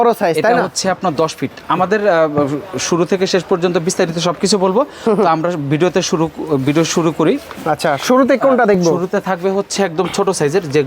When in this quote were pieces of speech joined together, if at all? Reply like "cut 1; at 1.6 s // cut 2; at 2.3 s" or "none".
none

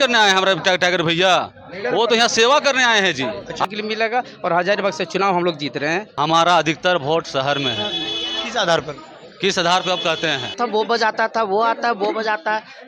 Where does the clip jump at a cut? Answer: cut 1; at 3.6 s // cut 2; at 6.1 s // cut 3; at 10.5 s

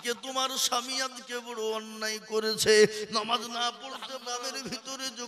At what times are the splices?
cut 1; at 4.2 s

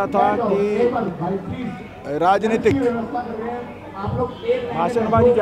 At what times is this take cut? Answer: none

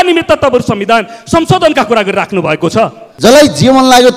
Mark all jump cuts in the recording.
cut 1; at 3.0 s

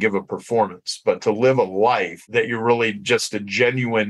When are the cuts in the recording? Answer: cut 1; at 2.2 s

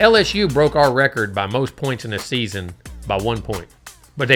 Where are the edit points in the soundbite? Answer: none

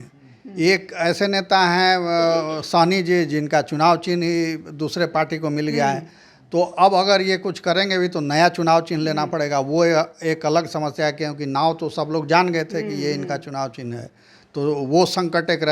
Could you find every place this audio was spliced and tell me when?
none

